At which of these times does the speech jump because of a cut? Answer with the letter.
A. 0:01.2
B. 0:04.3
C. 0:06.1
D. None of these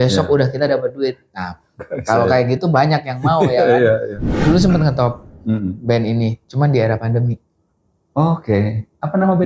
B